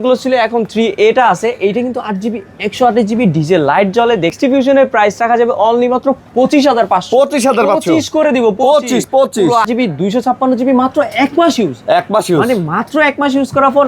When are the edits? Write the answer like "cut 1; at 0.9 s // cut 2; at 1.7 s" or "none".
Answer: cut 1; at 4.4 s // cut 2; at 9.6 s